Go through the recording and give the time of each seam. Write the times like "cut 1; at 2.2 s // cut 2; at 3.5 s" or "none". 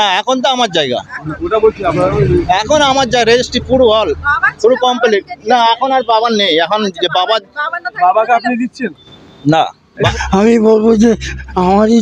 cut 1; at 10.1 s